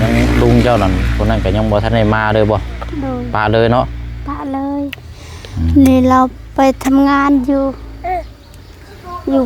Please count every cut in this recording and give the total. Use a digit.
0